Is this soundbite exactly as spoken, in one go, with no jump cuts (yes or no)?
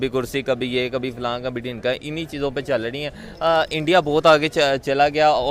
yes